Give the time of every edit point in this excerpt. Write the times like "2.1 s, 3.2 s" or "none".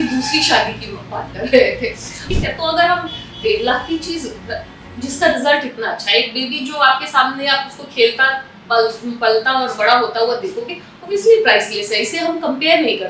2.1 s

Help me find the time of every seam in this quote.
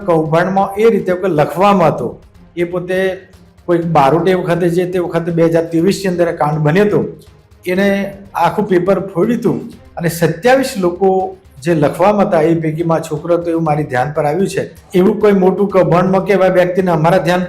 14.8 s

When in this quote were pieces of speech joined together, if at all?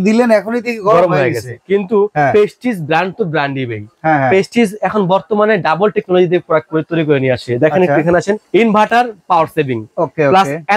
none

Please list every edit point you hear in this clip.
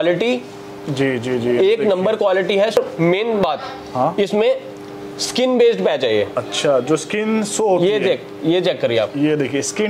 2.8 s

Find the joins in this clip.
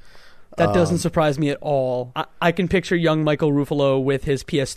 2.2 s

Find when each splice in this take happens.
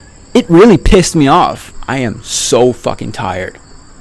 1.7 s

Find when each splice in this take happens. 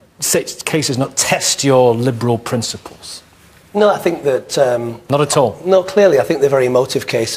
6.4 s

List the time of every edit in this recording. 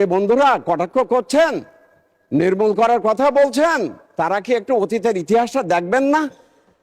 none

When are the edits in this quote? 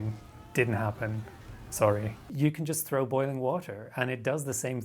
2.3 s

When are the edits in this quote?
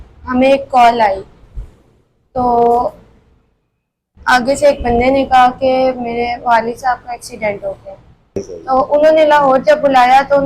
8.5 s

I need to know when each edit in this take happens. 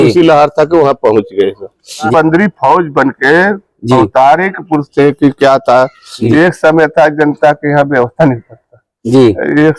2.1 s, 6.3 s

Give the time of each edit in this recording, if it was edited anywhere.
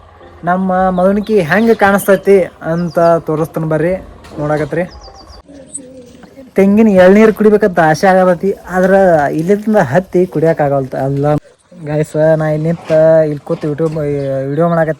5.6 s, 11.4 s

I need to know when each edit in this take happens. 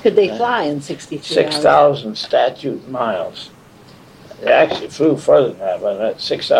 none

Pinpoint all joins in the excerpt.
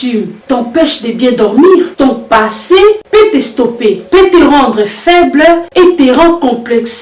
1.9 s

